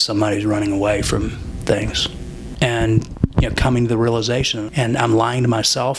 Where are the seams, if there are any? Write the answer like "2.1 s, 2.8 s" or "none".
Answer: 2.5 s, 4.6 s